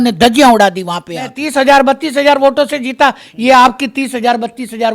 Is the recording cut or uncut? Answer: cut